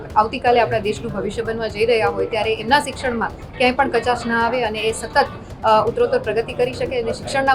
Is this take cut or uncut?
uncut